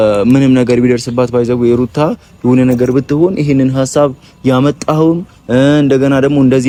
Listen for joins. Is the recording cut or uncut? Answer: uncut